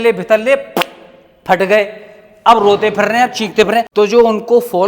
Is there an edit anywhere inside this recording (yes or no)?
yes